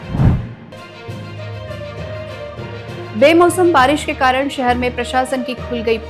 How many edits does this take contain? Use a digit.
2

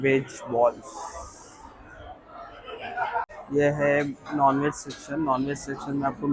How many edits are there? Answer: 1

